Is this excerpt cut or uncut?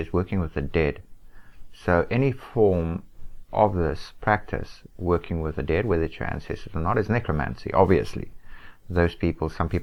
uncut